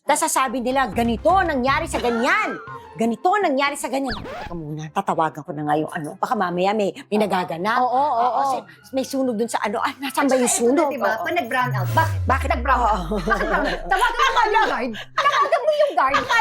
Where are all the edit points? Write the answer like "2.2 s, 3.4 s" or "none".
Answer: none